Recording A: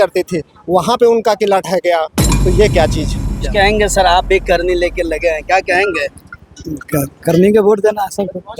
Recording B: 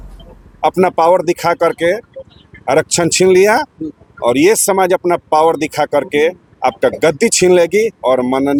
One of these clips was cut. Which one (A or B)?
A